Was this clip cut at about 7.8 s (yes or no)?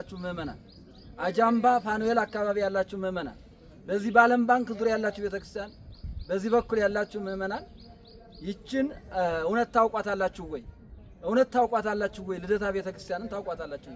no